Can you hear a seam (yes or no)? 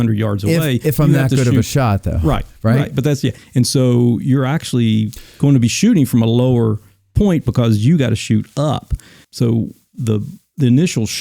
yes